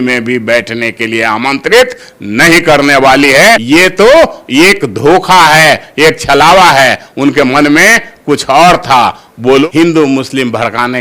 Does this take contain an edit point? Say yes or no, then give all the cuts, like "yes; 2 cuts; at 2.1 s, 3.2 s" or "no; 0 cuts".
yes; 2 cuts; at 3.6 s, 9.6 s